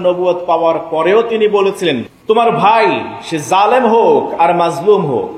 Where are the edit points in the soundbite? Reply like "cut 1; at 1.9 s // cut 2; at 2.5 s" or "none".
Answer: cut 1; at 2.1 s